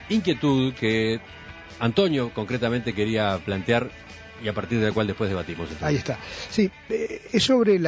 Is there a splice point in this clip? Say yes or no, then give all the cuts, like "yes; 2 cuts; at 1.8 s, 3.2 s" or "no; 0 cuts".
no; 0 cuts